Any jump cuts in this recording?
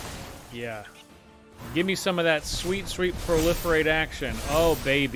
no; 0 cuts

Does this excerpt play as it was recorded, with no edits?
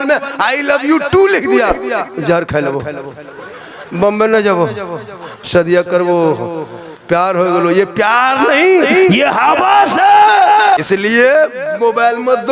no; 1 cut; at 10.8 s

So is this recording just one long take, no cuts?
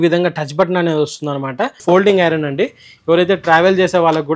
no; 1 cut; at 1.8 s

